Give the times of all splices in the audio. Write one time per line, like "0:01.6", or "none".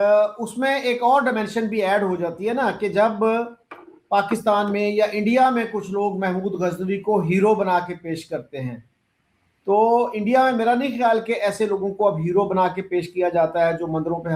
none